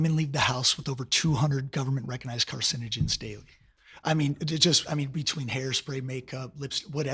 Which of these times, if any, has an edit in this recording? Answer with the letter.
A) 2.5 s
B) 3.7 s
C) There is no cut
C